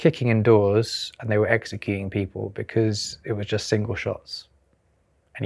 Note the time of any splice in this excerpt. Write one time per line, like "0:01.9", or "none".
none